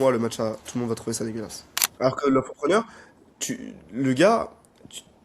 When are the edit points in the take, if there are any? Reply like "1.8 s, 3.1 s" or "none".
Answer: 1.9 s